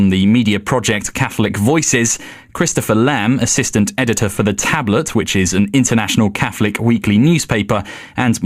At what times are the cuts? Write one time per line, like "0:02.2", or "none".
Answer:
0:05.3